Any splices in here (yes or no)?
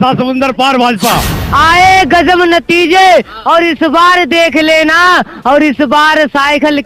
yes